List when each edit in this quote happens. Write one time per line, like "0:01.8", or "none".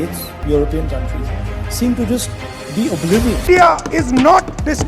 0:03.5